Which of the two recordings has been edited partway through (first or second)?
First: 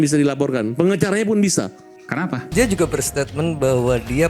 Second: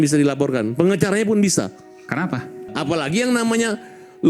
first